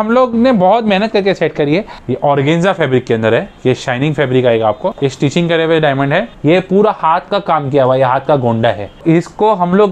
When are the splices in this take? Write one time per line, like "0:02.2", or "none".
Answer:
0:02.0
0:04.9
0:06.3
0:09.0